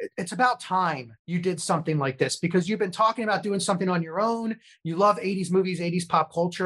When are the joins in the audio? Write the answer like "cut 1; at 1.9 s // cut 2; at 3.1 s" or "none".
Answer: cut 1; at 1.1 s